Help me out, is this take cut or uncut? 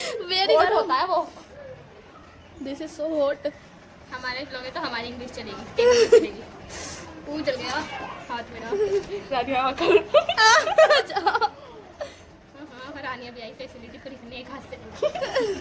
uncut